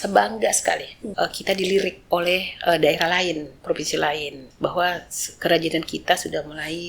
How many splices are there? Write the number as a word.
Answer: three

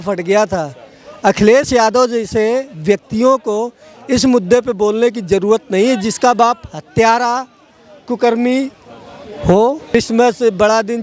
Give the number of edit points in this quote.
one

